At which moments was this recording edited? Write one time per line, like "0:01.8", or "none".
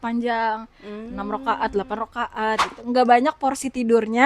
0:02.7